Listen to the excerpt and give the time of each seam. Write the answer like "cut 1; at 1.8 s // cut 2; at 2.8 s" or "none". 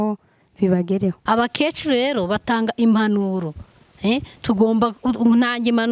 cut 1; at 1.2 s